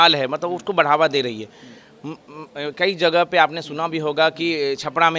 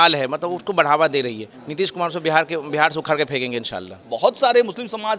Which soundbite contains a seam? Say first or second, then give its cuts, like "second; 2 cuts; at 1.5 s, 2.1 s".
second; 2 cuts; at 1.5 s, 4.0 s